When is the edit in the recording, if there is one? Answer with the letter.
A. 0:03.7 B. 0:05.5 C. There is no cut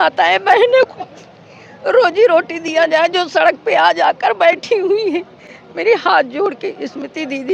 C